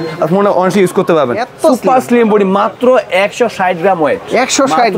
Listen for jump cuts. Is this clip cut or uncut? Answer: cut